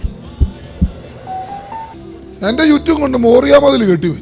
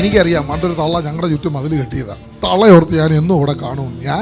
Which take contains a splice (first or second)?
first